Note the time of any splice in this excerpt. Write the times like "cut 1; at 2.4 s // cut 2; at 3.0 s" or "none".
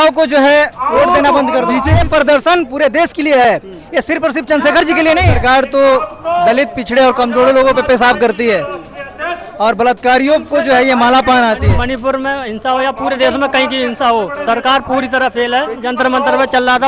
cut 1; at 1.9 s // cut 2; at 5.3 s // cut 3; at 11.7 s // cut 4; at 15.7 s